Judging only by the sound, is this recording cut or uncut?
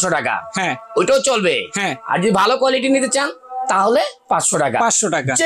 uncut